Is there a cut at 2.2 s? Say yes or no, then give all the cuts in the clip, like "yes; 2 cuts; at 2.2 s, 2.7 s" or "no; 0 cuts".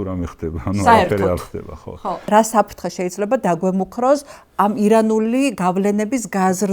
yes; 1 cut; at 2.2 s